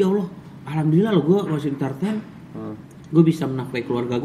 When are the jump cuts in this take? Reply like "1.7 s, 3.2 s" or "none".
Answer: none